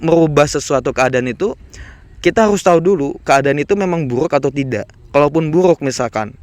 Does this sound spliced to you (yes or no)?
no